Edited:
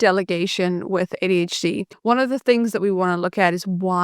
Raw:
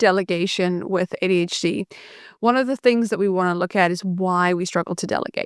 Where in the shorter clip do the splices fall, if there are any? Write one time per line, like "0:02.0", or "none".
0:01.9